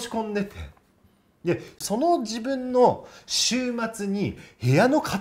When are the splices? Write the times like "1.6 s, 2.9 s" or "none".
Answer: 1.8 s